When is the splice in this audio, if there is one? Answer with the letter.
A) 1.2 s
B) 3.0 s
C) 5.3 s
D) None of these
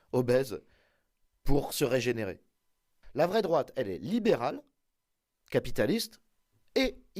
B